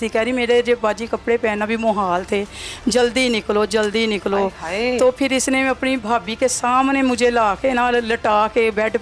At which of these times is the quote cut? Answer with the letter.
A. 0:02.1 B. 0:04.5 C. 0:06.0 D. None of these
C